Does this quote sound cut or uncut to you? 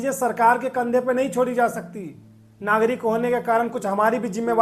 uncut